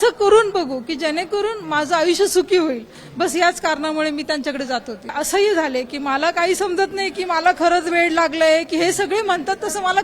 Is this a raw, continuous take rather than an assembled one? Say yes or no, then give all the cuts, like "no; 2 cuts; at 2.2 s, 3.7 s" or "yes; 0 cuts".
no; 1 cut; at 5.1 s